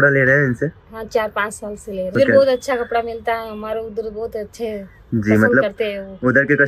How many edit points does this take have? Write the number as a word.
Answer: one